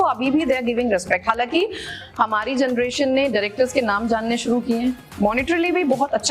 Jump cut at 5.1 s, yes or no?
yes